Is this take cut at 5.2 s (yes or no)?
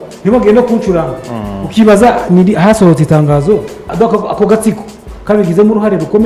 no